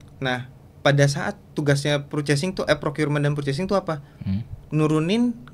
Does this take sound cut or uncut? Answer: uncut